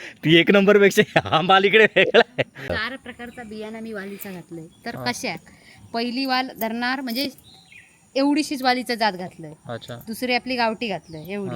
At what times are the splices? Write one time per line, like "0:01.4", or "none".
0:02.7